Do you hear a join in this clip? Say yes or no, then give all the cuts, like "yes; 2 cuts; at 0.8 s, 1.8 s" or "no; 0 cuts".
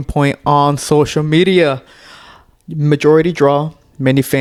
no; 0 cuts